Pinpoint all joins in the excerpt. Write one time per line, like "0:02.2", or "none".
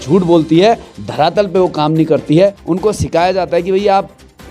0:02.6